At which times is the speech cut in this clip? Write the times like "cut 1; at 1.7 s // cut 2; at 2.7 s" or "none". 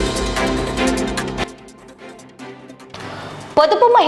cut 1; at 1.2 s